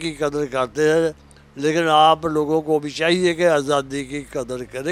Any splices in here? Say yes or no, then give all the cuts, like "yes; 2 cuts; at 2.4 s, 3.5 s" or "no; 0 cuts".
no; 0 cuts